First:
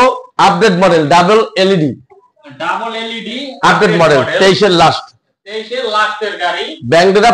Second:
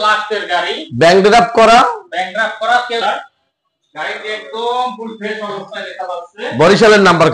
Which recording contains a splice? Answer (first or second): second